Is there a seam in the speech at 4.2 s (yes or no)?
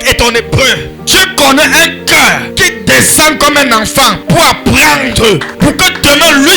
yes